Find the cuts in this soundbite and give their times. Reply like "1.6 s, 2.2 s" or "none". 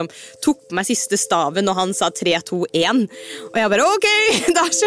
none